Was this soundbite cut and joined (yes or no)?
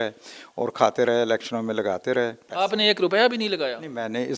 yes